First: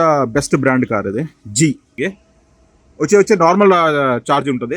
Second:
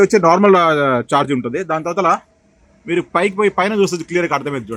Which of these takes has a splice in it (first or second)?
first